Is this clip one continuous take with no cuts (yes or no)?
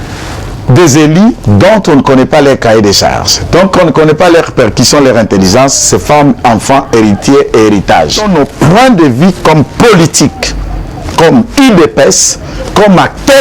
no